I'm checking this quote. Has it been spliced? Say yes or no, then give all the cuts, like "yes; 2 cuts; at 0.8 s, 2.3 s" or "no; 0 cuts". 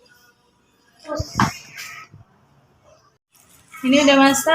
yes; 1 cut; at 1.3 s